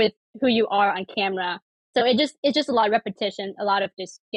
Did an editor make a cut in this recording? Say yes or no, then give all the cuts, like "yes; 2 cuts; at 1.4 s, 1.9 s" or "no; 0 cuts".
no; 0 cuts